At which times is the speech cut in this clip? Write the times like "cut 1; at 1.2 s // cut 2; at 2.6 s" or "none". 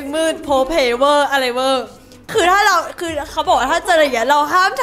cut 1; at 2.2 s